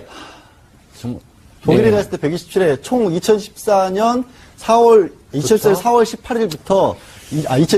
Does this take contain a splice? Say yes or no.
no